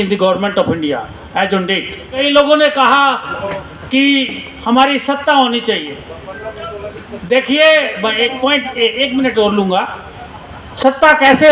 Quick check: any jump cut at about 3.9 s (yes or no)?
no